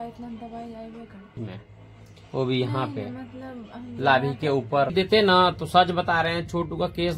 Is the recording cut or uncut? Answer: cut